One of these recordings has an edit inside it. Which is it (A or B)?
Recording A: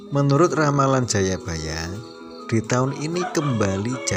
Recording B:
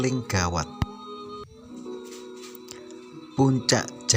B